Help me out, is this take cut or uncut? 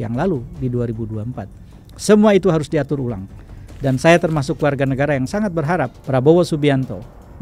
cut